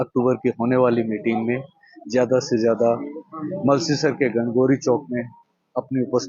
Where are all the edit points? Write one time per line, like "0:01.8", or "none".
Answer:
none